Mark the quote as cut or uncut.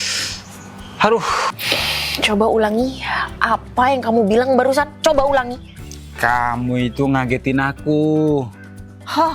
cut